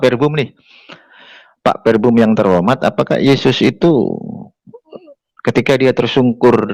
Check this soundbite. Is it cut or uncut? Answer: uncut